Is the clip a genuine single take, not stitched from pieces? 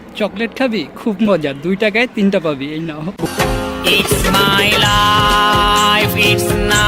yes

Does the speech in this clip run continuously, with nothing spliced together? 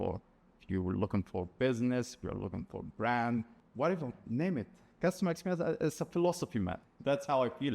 no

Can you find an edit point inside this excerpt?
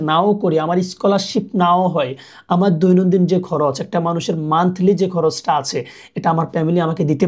no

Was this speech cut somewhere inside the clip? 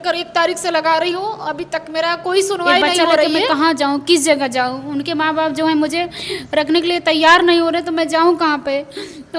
yes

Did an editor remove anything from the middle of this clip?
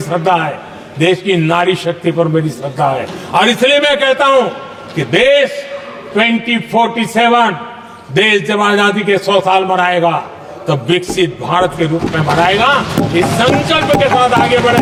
no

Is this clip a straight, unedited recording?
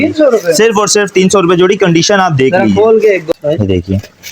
no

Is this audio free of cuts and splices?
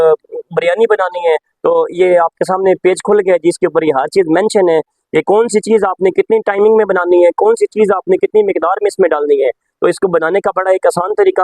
yes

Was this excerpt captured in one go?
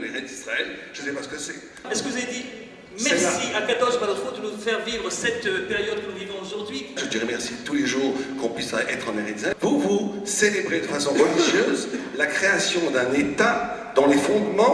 no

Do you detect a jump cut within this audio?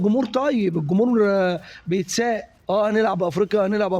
yes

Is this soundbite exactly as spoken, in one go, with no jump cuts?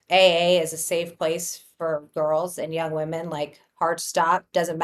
yes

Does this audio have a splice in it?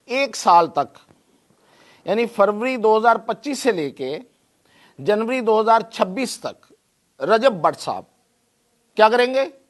no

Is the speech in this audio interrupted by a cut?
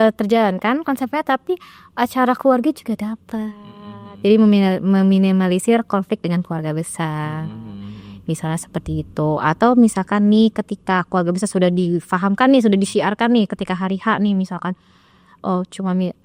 no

